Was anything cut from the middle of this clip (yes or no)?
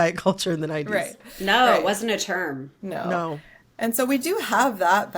no